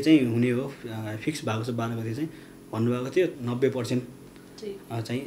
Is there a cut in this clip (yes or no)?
yes